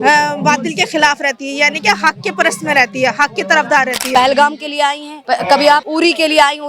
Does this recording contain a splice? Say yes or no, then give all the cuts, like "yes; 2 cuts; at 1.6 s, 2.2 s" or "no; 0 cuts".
yes; 3 cuts; at 4.0 s, 5.1 s, 5.9 s